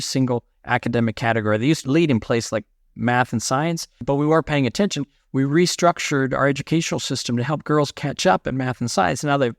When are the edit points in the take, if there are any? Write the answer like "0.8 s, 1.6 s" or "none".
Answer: 1.8 s, 4.0 s